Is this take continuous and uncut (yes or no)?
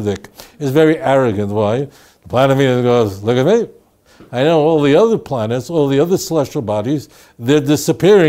yes